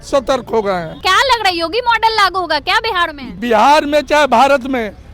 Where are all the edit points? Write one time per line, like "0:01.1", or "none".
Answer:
0:01.0
0:03.2

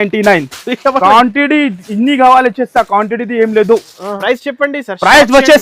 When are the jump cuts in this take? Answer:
0:04.2

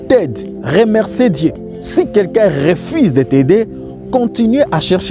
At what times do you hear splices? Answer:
none

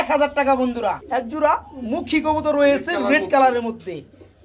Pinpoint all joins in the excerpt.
0:01.0

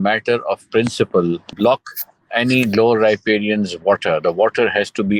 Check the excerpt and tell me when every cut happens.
0:01.5

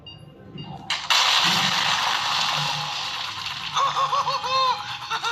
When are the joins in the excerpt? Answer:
none

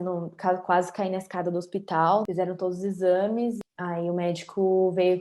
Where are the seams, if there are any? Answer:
0:02.2
0:03.6

